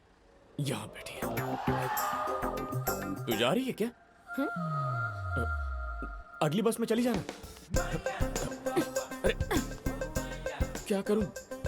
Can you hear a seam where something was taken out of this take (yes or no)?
yes